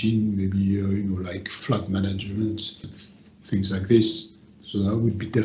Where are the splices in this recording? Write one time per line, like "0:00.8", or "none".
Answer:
0:01.6
0:02.8